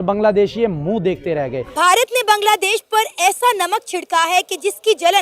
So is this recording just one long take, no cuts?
no; 1 cut; at 1.7 s

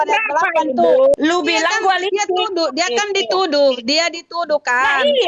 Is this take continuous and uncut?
no; 1 cut; at 1.1 s

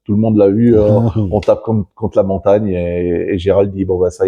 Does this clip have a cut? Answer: yes; 1 cut; at 2.7 s

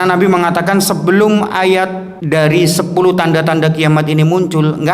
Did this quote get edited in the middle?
yes; 1 cut; at 2.1 s

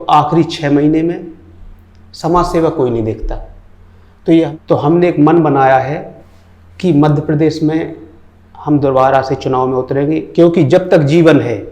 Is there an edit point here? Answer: yes; 1 cut; at 4.5 s

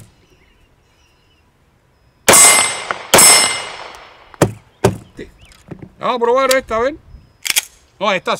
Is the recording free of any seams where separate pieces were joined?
no; 1 cut; at 5.2 s

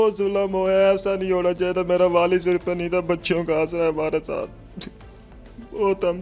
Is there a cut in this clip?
no; 0 cuts

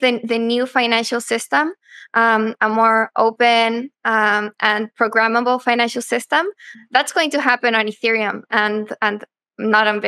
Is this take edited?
yes; 1 cut; at 6.7 s

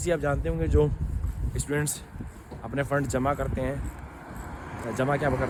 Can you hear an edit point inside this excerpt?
no; 0 cuts

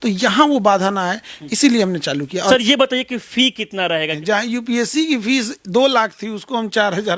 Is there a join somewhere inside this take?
yes; 2 cuts; at 2.5 s, 4.1 s

